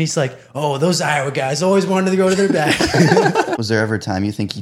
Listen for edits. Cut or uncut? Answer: cut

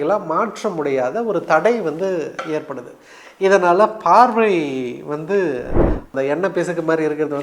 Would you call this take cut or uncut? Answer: cut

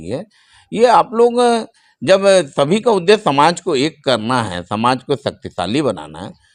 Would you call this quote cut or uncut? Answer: uncut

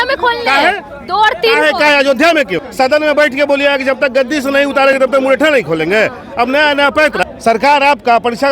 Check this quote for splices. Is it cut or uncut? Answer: cut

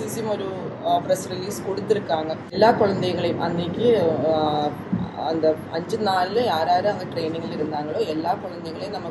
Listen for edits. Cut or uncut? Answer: cut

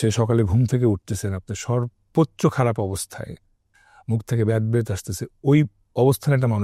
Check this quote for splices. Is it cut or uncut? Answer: uncut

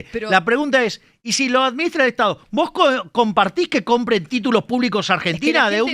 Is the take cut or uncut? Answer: uncut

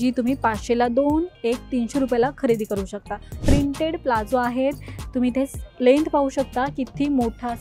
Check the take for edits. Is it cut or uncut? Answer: cut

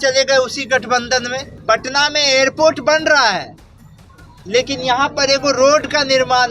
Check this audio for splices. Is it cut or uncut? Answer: cut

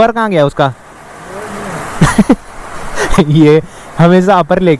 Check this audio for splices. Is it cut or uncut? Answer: uncut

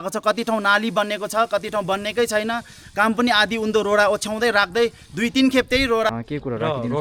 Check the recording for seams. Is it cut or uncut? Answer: cut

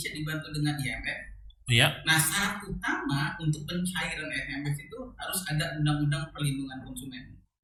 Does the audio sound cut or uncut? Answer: uncut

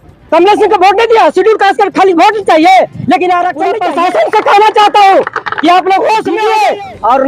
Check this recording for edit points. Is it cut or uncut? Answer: cut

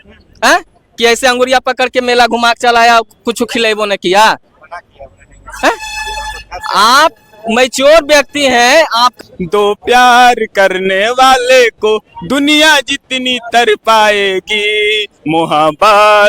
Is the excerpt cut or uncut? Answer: cut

